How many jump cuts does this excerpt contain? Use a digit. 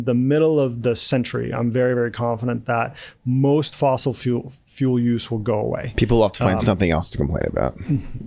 0